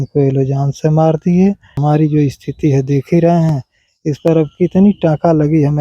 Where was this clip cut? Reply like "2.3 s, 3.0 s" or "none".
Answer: 1.7 s